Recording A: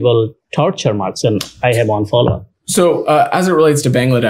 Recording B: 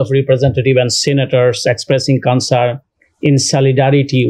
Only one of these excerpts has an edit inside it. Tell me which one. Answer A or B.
A